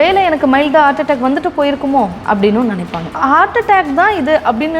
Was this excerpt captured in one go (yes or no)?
no